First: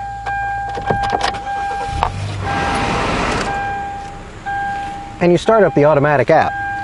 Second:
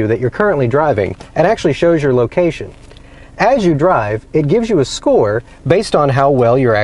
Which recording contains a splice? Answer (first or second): second